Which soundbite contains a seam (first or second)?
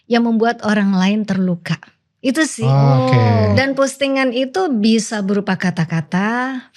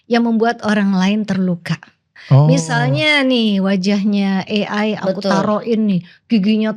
second